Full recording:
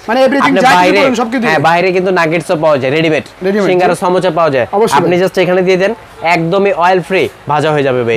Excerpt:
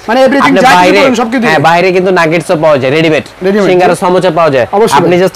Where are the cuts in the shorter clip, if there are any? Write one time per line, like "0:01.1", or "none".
none